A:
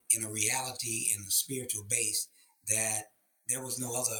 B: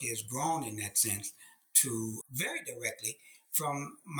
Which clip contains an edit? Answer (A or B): B